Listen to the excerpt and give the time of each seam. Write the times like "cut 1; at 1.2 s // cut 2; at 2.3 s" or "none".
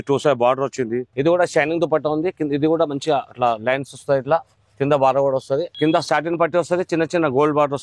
cut 1; at 1.1 s // cut 2; at 5.7 s